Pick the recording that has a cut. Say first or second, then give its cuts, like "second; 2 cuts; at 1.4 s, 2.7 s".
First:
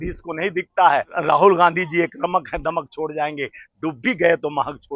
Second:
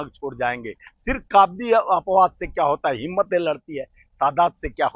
first; 1 cut; at 1.1 s